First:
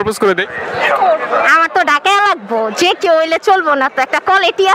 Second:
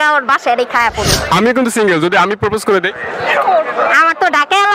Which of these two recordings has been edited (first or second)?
second